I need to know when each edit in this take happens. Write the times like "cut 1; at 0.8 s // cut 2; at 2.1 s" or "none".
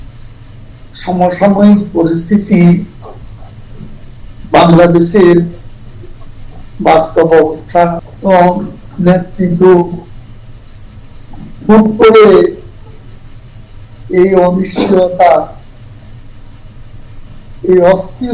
cut 1; at 8.1 s

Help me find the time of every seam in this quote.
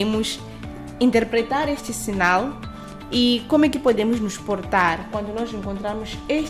none

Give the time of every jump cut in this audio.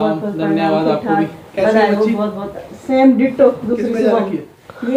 none

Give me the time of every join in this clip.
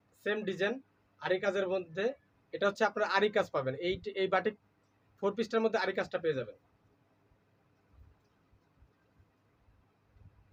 none

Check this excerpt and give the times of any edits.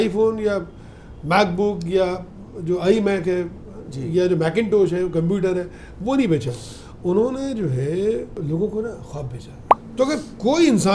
cut 1; at 9.7 s

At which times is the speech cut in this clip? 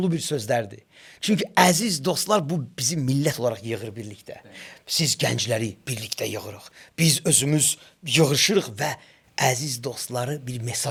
none

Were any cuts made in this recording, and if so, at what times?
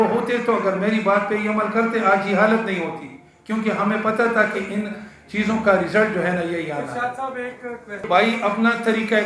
cut 1; at 8.1 s

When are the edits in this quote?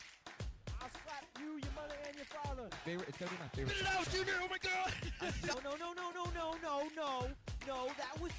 none

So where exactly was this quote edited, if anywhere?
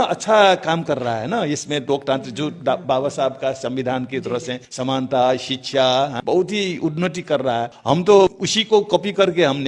cut 1; at 4.6 s // cut 2; at 6.2 s // cut 3; at 7.7 s // cut 4; at 8.5 s

